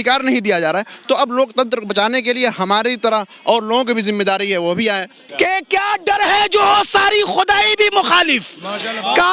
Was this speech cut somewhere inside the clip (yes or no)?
yes